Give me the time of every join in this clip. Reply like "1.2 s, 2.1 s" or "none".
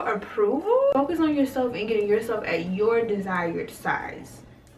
0.9 s